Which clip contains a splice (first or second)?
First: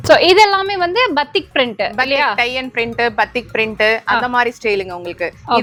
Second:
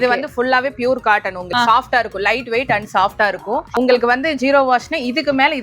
second